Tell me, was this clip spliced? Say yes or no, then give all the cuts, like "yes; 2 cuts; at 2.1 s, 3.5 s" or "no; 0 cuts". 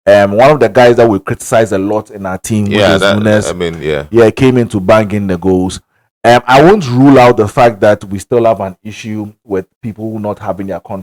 no; 0 cuts